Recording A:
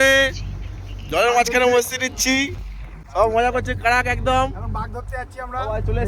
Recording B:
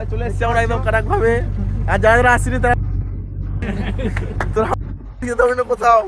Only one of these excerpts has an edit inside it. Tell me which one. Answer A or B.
B